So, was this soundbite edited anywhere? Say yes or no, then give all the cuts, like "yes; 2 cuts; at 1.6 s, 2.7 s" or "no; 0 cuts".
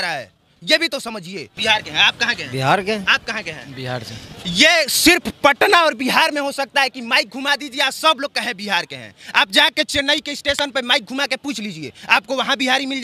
yes; 1 cut; at 1.5 s